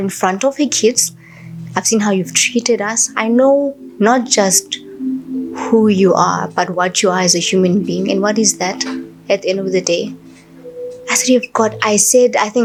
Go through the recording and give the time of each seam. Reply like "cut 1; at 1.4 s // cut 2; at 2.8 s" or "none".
none

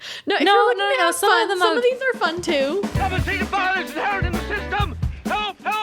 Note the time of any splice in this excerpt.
cut 1; at 2.8 s

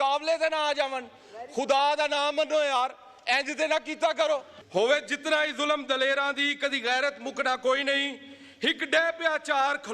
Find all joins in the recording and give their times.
cut 1; at 4.6 s

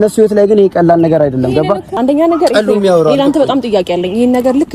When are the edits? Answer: cut 1; at 1.9 s

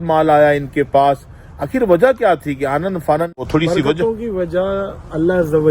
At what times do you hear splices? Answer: cut 1; at 3.4 s

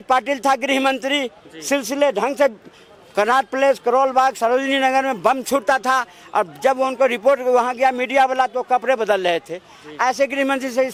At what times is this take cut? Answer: none

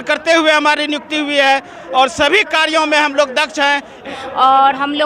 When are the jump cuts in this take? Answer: cut 1; at 4.0 s

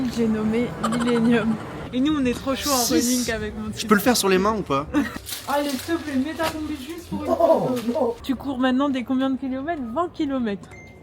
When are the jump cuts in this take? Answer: cut 1; at 1.8 s // cut 2; at 5.1 s // cut 3; at 8.2 s

